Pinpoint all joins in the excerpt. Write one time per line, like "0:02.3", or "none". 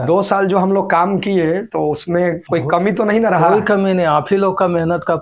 0:01.9